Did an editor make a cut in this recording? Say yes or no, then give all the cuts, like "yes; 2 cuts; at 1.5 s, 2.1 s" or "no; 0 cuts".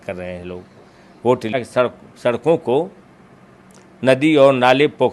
yes; 1 cut; at 1.5 s